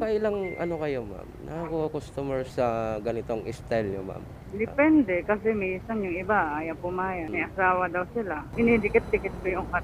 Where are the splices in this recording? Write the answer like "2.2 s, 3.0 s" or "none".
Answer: 2.5 s, 7.3 s, 8.5 s